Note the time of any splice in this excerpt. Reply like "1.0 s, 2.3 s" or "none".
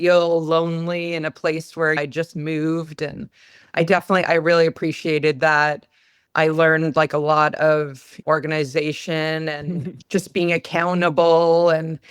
8.1 s